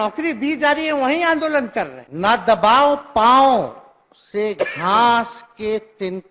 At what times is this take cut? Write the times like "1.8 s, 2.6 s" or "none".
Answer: 2.0 s